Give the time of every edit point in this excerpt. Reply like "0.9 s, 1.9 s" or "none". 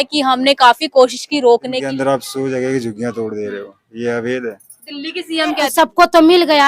1.8 s, 5.6 s

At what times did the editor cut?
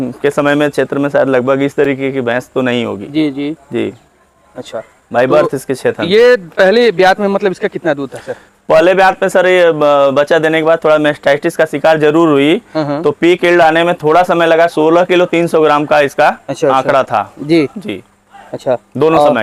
none

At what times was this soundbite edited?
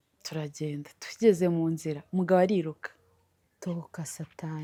none

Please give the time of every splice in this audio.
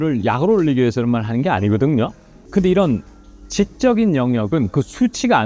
2.4 s

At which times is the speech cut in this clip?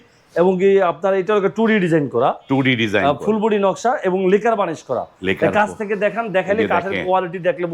none

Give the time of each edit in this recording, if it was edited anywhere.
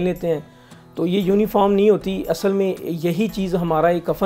none

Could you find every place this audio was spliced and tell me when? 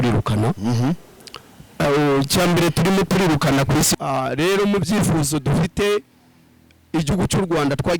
3.9 s

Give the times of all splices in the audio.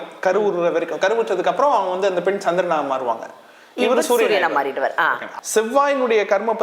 5.2 s

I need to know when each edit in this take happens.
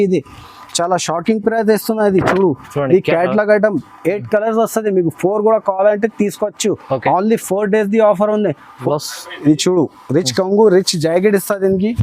8.8 s

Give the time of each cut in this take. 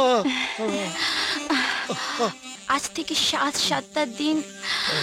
2.5 s

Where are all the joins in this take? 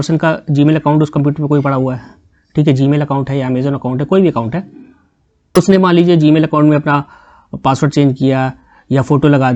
none

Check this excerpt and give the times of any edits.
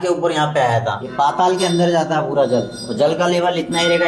1.0 s

